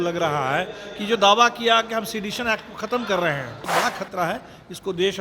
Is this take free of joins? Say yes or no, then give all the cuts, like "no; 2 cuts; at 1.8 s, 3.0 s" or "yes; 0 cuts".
no; 1 cut; at 3.7 s